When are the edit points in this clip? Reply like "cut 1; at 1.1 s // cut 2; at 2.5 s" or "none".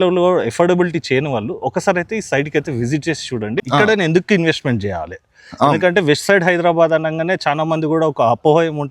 cut 1; at 3.6 s